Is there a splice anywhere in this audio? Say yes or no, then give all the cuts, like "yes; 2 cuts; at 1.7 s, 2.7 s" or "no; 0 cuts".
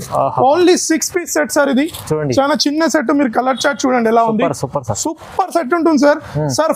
no; 0 cuts